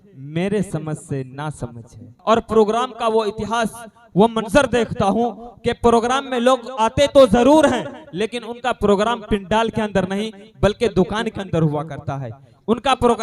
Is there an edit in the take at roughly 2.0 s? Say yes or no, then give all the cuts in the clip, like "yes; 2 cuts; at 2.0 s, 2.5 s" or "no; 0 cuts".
yes; 1 cut; at 2.0 s